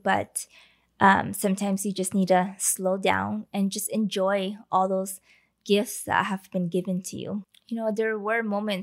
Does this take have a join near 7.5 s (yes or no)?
yes